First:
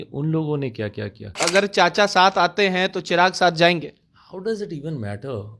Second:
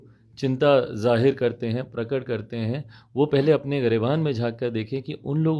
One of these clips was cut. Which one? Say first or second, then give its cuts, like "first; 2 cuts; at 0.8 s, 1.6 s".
first; 1 cut; at 1.4 s